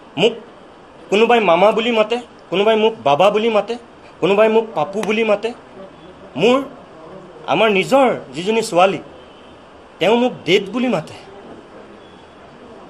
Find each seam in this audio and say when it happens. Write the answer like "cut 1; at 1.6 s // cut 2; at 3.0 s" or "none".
none